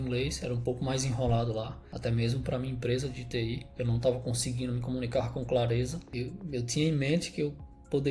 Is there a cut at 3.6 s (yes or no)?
no